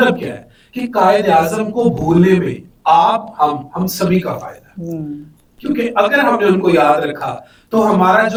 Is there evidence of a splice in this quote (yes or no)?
no